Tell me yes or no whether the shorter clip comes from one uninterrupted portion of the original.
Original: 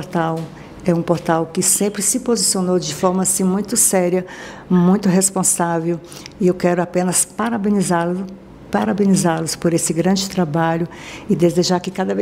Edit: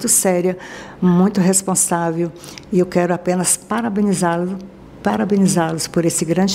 yes